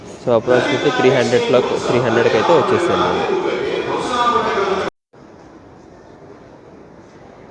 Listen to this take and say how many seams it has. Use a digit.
0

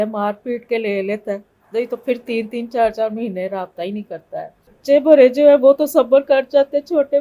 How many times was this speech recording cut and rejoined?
1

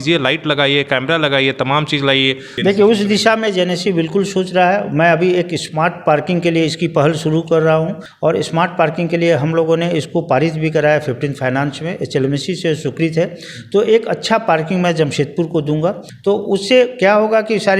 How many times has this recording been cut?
3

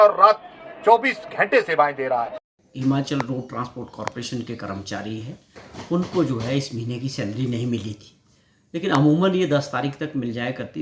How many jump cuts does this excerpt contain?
1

